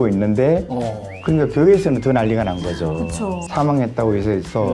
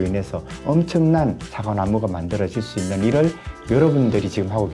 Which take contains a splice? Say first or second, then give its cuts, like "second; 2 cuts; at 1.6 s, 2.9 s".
first; 1 cut; at 3.4 s